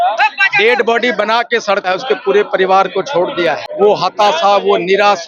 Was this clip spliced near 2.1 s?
no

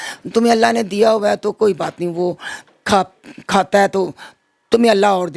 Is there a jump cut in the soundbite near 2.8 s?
no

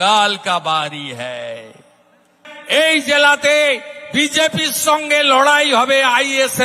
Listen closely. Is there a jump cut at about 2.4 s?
yes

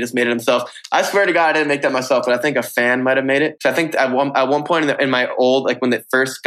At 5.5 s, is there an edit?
no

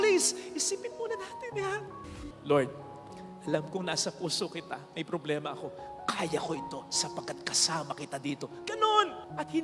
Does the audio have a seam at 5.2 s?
no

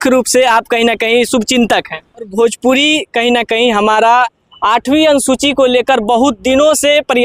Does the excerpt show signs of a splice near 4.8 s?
no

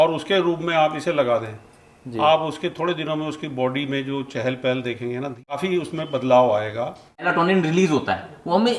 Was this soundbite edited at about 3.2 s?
no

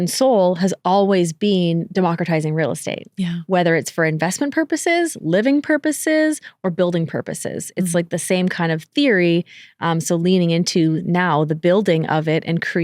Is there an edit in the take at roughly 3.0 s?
no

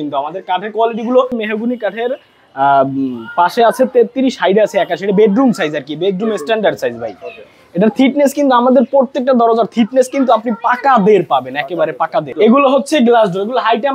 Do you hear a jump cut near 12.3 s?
yes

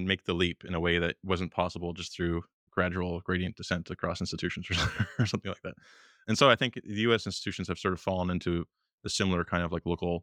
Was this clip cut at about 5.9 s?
no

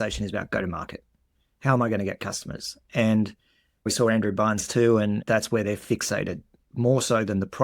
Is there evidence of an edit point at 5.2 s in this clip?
yes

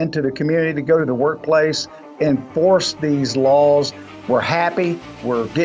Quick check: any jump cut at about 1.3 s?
no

